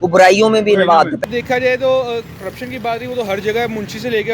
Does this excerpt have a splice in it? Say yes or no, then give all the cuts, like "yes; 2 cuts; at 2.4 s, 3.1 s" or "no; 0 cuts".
yes; 1 cut; at 1.2 s